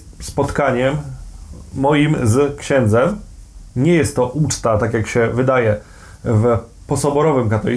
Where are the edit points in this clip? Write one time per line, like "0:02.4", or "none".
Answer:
none